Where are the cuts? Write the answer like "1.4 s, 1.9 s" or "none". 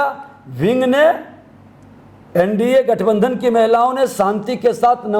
none